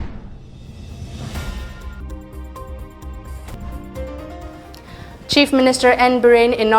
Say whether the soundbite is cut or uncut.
cut